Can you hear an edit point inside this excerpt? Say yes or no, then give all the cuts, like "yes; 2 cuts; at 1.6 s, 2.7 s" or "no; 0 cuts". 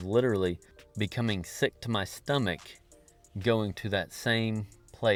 no; 0 cuts